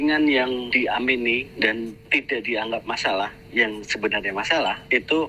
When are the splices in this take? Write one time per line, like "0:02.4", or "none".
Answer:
0:02.0